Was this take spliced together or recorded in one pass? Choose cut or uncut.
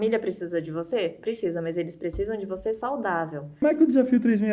cut